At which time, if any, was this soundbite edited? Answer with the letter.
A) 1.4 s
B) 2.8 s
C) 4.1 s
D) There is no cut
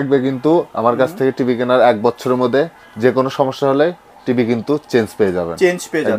D